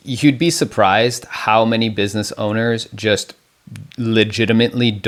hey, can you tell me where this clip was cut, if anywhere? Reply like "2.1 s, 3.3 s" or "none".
none